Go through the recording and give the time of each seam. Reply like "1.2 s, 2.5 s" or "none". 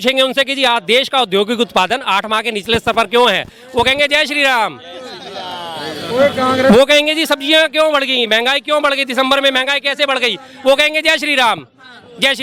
none